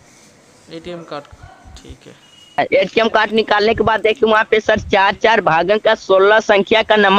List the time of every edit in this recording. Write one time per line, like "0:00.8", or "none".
0:02.6